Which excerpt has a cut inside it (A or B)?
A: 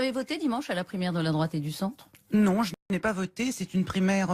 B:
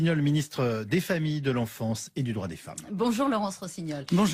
A